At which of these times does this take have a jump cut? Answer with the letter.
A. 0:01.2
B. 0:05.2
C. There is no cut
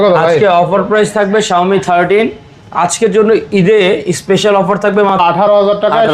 B